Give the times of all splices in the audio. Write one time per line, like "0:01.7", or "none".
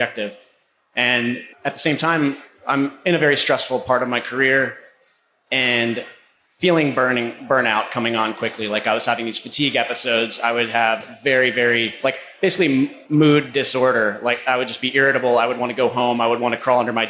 0:01.5
0:13.0